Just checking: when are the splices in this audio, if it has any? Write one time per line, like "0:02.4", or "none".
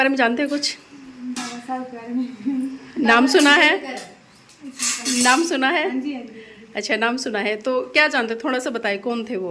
none